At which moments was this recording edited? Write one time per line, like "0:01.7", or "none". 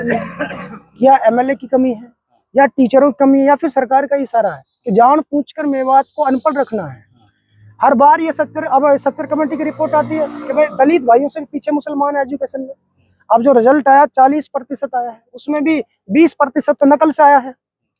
none

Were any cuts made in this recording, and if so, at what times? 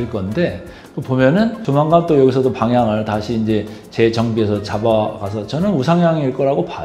0:01.6

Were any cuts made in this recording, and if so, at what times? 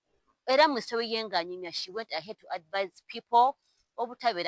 none

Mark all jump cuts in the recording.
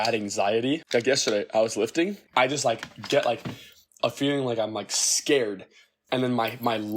0:00.8
0:02.2

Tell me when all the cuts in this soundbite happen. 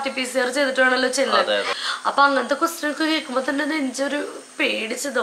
0:01.8

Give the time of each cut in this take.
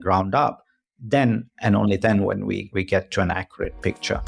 0:02.6

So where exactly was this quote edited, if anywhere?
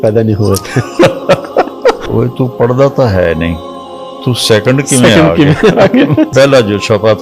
none

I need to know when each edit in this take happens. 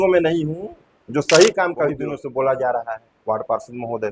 0:02.0

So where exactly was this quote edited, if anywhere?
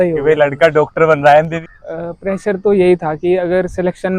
0:01.6

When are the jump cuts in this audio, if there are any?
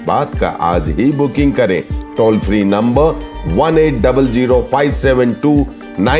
none

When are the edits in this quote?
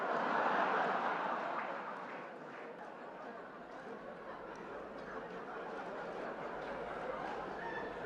0:02.8

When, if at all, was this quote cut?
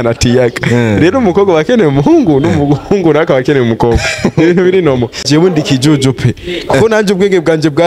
0:05.2

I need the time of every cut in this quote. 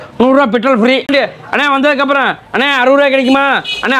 0:01.1

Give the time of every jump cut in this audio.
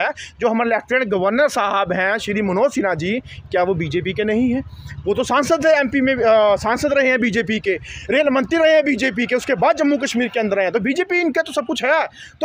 none

